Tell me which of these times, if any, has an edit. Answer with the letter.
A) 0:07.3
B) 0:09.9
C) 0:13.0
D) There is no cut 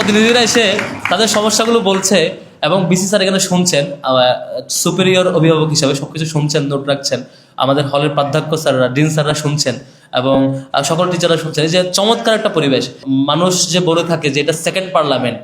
C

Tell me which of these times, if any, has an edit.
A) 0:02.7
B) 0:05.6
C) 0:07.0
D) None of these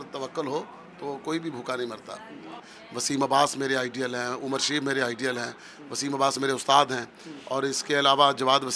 A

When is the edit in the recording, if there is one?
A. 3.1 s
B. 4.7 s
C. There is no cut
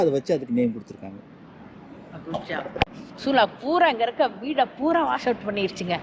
A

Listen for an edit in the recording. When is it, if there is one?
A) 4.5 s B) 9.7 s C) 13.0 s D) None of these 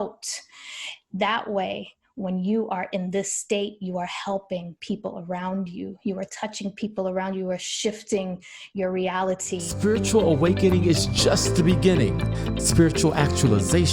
B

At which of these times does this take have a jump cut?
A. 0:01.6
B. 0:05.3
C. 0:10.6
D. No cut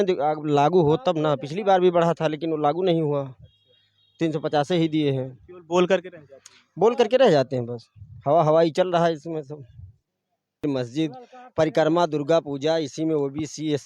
C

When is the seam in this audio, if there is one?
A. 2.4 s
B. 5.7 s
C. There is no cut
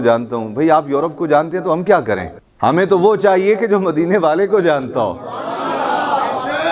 C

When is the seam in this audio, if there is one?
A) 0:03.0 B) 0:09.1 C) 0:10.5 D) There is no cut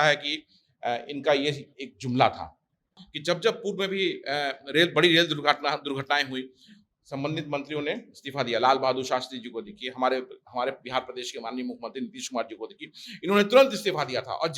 A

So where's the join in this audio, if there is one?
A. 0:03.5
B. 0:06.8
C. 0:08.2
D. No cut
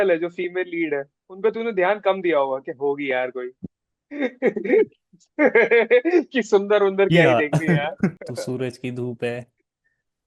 C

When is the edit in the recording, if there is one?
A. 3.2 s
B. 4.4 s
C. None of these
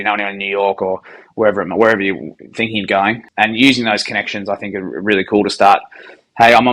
A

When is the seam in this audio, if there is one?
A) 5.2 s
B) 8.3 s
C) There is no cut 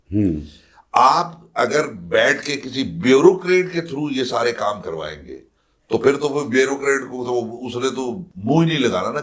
B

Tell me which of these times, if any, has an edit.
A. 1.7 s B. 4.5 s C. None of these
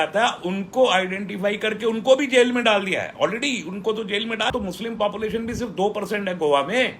B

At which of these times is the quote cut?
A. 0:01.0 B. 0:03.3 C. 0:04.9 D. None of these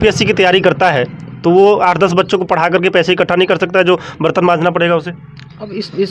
D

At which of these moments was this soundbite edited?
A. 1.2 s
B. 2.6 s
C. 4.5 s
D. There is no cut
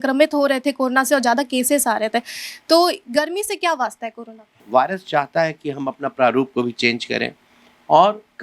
C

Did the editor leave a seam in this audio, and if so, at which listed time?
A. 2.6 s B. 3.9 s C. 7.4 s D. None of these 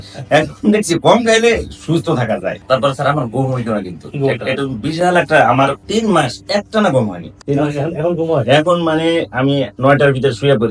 A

